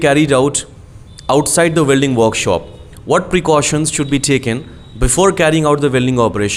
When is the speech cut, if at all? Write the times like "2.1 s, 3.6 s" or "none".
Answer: none